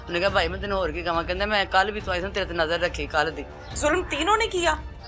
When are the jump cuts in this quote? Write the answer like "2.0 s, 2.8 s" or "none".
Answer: 3.8 s